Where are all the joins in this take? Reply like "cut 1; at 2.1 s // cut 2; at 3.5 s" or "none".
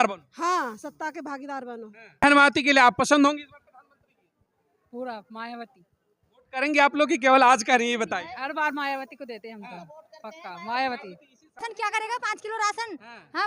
cut 1; at 2.2 s // cut 2; at 11.7 s